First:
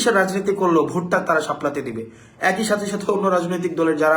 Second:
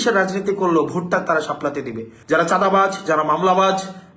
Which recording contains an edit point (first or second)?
second